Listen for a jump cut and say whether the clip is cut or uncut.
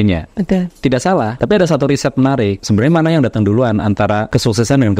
cut